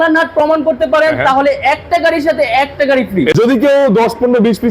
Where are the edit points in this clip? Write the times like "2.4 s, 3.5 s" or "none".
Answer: 3.3 s